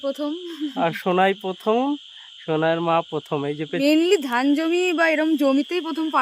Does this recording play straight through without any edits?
no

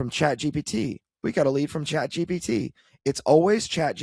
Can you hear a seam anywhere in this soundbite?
no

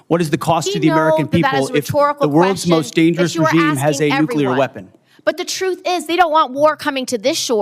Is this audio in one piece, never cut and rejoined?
no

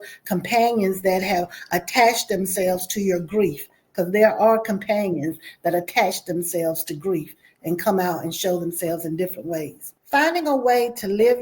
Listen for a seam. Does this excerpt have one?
yes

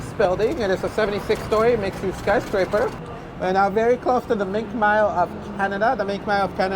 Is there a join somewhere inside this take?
yes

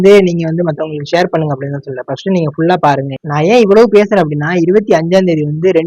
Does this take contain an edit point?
yes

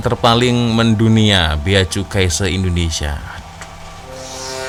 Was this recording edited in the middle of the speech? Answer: no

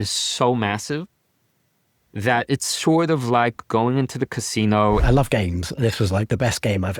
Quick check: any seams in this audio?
yes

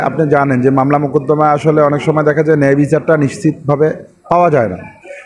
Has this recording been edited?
no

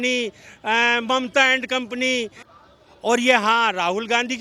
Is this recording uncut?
no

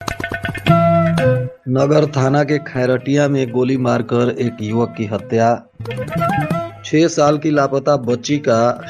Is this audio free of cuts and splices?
no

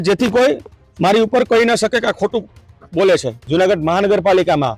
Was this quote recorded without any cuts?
no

